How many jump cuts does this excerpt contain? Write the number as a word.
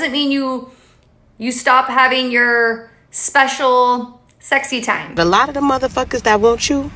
one